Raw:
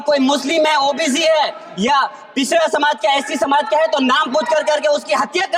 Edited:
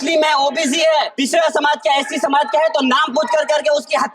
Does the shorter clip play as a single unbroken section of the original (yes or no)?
no